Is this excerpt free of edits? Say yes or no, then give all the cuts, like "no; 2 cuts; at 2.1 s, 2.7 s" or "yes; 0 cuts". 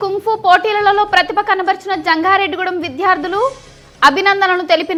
yes; 0 cuts